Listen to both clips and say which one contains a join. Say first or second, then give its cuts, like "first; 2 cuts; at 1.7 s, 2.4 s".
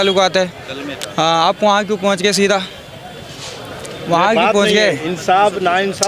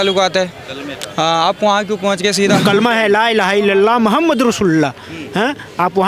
second; 1 cut; at 2.6 s